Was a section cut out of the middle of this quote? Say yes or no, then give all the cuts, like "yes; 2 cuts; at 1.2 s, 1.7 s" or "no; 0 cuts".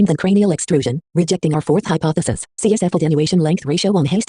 no; 0 cuts